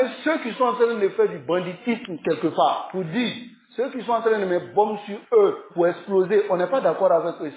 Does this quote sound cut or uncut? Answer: uncut